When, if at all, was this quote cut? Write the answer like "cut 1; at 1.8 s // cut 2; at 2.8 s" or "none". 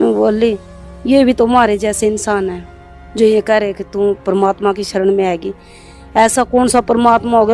none